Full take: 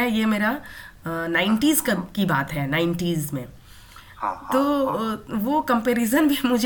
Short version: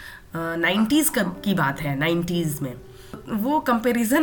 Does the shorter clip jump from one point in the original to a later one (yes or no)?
yes